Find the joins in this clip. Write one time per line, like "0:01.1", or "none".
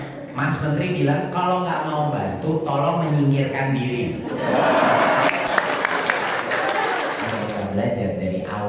0:07.3